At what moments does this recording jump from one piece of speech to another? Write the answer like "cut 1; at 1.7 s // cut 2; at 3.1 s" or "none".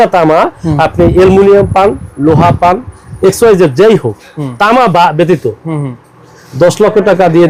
none

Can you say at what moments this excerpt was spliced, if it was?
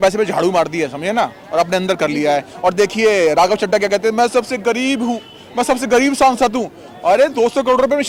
none

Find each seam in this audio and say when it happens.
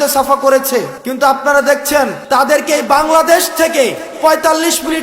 cut 1; at 1.0 s // cut 2; at 2.2 s

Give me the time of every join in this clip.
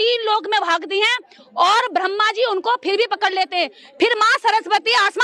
none

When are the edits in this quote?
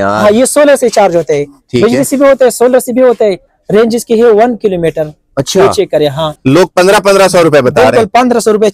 cut 1; at 6.3 s

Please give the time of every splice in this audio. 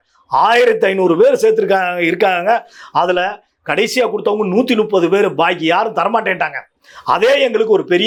none

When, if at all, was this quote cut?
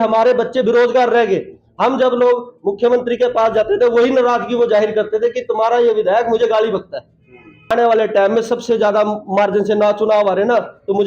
cut 1; at 7.7 s

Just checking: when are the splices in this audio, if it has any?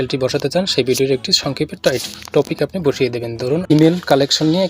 cut 1; at 3.7 s

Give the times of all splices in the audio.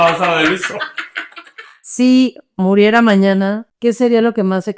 cut 1; at 1.8 s // cut 2; at 3.7 s

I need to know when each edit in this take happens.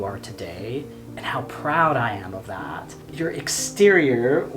cut 1; at 1.0 s // cut 2; at 3.0 s

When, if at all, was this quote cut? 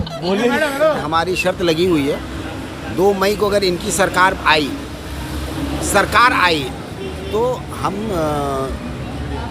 cut 1; at 1.0 s

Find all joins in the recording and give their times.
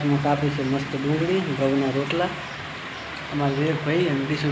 none

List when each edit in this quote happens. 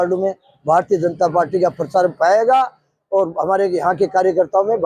none

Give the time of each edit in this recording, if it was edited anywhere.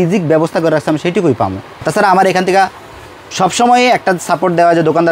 cut 1; at 1.9 s

